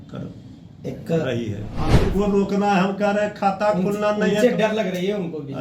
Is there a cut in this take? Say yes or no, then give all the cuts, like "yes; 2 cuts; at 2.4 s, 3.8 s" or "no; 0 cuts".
yes; 1 cut; at 1.9 s